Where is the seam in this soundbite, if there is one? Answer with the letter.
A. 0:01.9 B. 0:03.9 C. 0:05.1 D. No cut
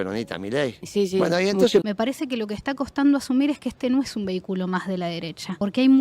A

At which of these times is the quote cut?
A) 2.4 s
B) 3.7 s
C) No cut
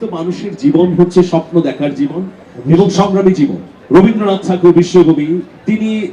B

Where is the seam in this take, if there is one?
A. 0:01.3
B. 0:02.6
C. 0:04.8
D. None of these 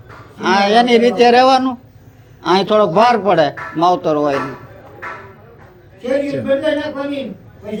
D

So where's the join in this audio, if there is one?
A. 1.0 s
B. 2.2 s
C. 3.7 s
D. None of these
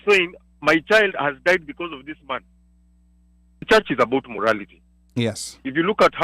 C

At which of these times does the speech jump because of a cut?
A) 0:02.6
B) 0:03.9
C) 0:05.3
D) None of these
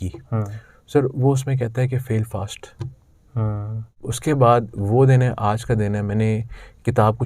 B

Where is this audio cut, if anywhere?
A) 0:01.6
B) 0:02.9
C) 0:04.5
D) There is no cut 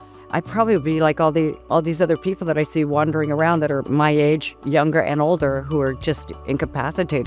A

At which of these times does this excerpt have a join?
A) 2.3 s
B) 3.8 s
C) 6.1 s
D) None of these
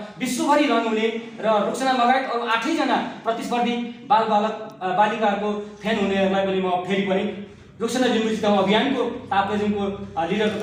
D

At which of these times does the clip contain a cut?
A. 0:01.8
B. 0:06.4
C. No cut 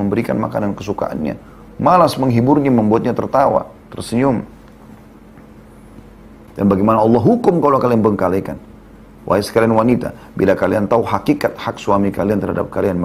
B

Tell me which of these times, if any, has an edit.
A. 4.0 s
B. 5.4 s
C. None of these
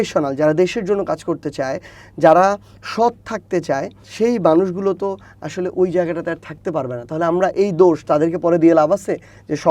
A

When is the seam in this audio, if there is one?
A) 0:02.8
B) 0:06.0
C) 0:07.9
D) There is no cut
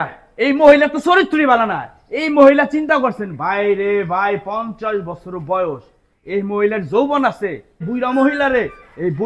C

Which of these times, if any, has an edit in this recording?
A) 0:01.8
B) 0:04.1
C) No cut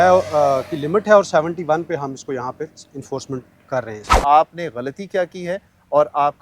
B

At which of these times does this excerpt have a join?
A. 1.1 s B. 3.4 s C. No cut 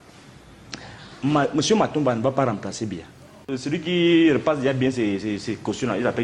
B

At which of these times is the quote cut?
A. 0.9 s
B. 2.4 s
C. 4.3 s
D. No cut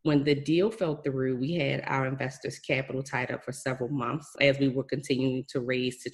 C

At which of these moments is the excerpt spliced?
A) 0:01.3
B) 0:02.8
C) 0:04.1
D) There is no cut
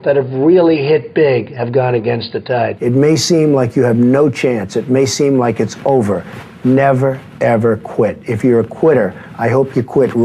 B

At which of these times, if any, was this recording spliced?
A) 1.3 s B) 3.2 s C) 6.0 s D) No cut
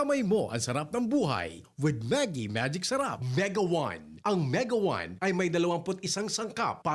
B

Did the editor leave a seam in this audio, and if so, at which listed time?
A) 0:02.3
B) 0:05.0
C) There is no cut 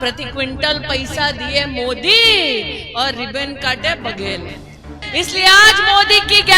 B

